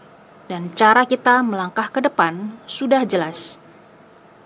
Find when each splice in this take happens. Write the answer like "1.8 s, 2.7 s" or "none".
none